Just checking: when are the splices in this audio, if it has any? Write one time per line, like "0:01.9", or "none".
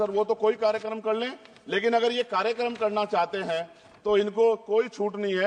none